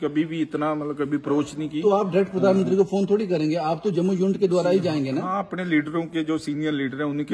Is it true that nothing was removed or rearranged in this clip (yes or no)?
yes